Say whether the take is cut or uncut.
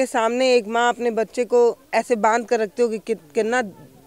uncut